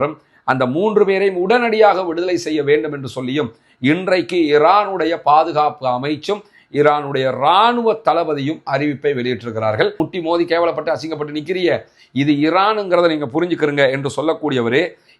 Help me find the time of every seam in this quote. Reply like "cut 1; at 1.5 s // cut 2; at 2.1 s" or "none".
cut 1; at 9.9 s